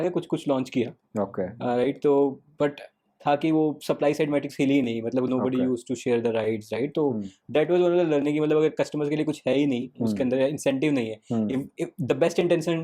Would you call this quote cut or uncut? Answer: uncut